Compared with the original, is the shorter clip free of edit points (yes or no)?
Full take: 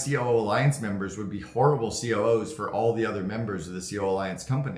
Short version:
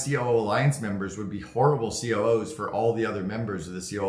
yes